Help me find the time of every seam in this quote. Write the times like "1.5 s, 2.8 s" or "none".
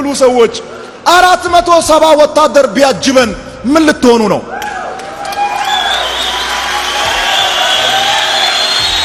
none

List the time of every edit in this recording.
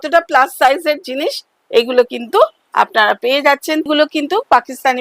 3.9 s

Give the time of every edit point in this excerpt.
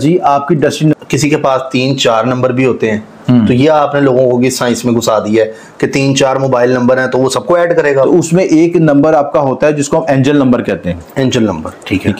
0.9 s, 8.1 s

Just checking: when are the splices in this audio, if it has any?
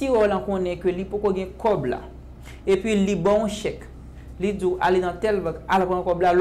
none

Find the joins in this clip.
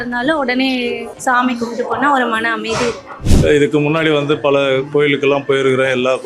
1.1 s, 3.2 s

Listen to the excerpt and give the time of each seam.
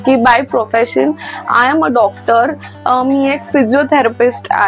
none

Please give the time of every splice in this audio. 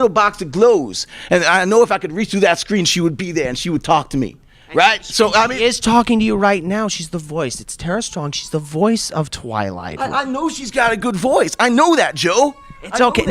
2.9 s

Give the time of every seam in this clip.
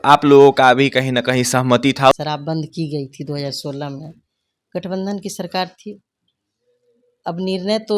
2.1 s

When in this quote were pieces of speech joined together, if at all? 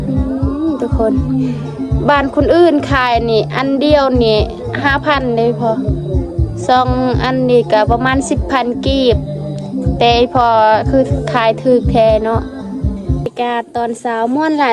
13.3 s

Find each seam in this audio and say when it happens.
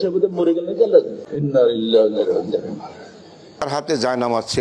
1.3 s, 3.6 s

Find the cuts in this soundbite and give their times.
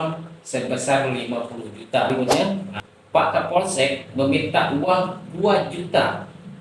2.1 s

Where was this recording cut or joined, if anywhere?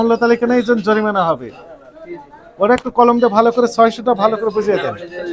none

